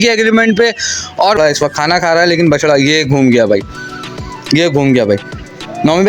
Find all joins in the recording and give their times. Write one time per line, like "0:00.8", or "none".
0:01.4